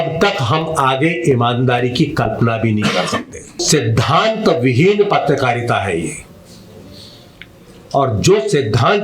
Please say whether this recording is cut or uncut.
cut